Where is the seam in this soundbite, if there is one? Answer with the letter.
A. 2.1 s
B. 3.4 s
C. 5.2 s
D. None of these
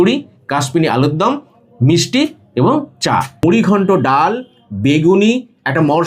B